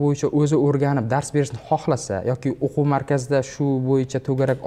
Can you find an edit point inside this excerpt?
no; 0 cuts

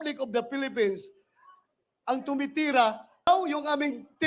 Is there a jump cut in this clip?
yes; 1 cut; at 3.3 s

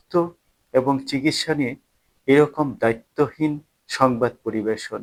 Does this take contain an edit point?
no; 0 cuts

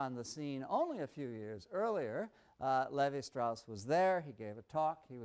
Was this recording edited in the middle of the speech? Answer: no; 0 cuts

